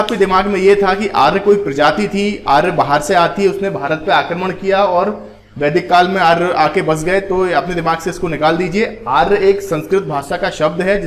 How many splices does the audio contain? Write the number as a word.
zero